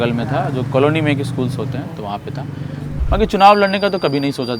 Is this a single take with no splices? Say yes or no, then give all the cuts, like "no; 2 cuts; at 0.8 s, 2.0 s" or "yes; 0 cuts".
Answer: no; 1 cut; at 2.9 s